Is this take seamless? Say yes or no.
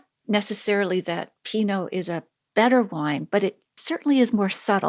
yes